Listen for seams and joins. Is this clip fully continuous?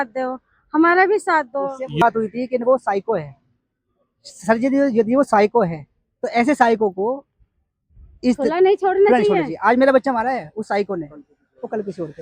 no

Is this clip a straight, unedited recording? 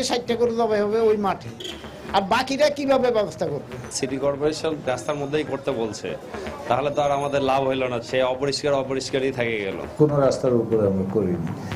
no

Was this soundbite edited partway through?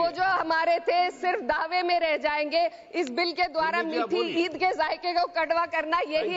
no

